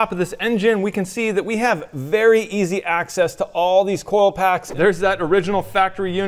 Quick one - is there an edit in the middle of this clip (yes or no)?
yes